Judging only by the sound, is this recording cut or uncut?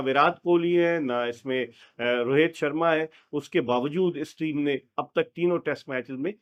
uncut